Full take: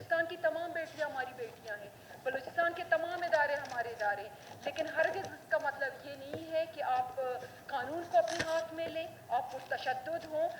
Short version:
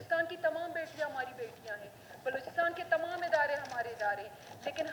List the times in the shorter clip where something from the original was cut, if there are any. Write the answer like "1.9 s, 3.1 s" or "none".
none